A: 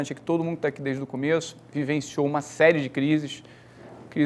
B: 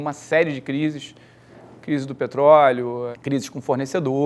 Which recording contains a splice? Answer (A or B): B